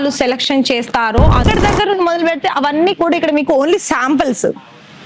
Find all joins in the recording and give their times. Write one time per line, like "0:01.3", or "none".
0:01.4